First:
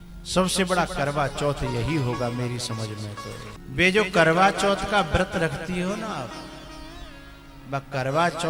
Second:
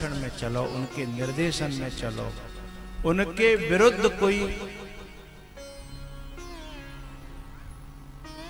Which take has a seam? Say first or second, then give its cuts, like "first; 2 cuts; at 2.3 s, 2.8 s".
first; 1 cut; at 3.5 s